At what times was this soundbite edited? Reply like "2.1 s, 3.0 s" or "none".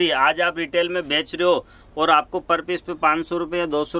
none